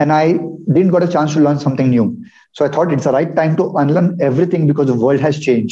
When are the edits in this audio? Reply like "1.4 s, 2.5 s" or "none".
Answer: none

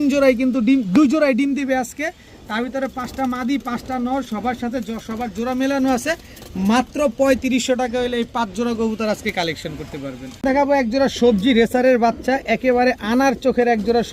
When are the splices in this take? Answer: none

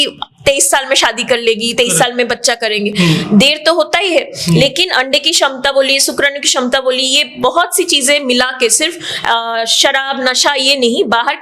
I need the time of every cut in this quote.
none

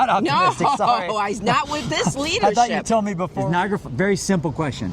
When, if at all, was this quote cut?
3.3 s

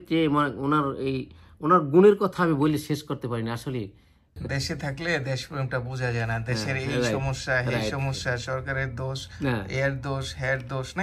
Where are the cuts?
4.4 s

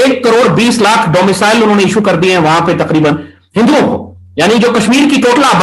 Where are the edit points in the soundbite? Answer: none

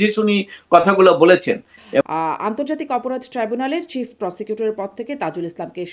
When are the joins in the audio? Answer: 2.0 s

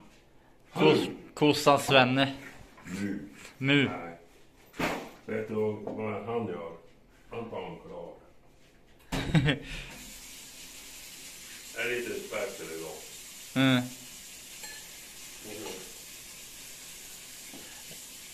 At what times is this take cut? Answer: none

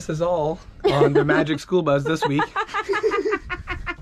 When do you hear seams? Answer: none

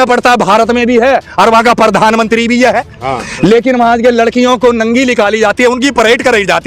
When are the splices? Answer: none

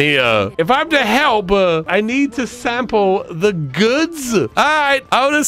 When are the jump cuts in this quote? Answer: 4.5 s

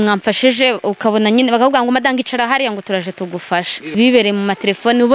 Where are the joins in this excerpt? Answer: 3.9 s

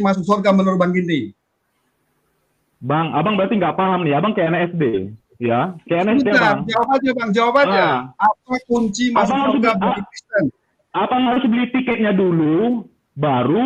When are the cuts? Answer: none

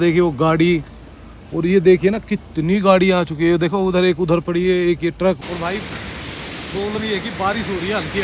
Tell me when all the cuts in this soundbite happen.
5.4 s

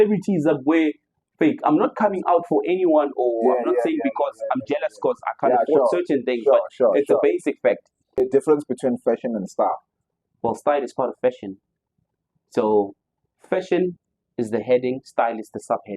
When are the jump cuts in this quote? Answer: 8.2 s

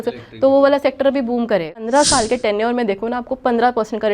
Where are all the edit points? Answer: 1.8 s

